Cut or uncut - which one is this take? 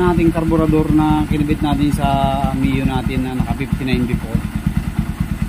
uncut